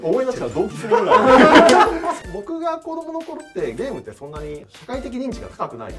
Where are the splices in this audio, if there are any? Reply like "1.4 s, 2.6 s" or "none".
2.2 s, 4.7 s

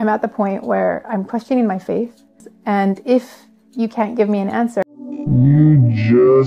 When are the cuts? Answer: 2.5 s, 4.8 s

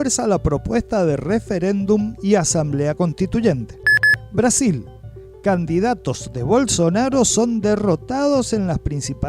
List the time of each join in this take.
3.7 s

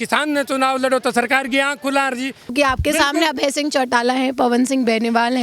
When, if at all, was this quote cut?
2.5 s

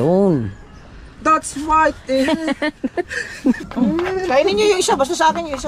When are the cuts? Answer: 3.6 s

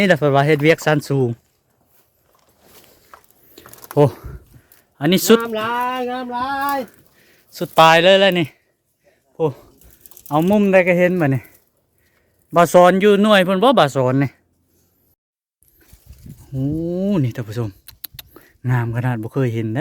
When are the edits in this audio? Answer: 15.1 s

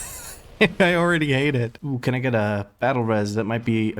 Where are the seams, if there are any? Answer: 1.8 s

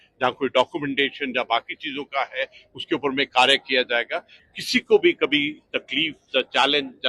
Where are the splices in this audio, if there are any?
4.3 s

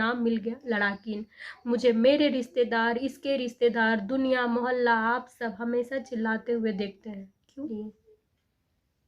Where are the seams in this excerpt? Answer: 7.7 s

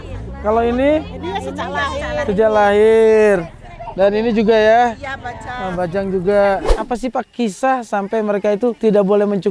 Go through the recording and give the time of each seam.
6.7 s, 8.8 s

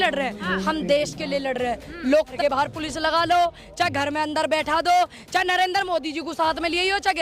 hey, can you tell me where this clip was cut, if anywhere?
2.3 s

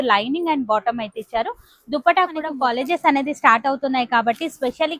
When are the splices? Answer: 2.5 s

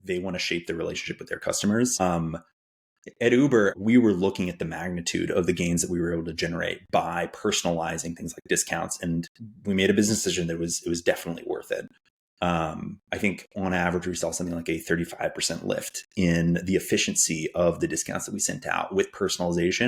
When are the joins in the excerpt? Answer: 2.0 s, 3.8 s

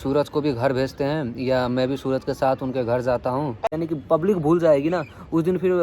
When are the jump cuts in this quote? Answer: 3.8 s

